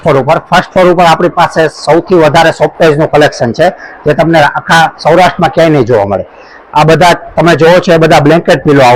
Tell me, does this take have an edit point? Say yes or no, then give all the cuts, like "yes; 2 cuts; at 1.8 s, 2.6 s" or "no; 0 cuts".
no; 0 cuts